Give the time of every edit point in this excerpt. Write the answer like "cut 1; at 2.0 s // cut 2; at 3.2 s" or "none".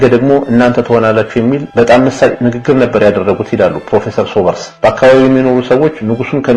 cut 1; at 4.7 s